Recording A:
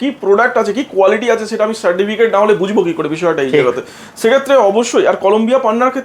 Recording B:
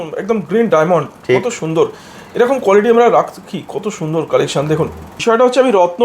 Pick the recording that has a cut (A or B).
B